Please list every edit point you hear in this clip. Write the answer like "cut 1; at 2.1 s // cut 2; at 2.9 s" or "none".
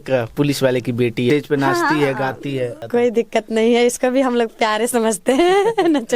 cut 1; at 1.3 s // cut 2; at 2.8 s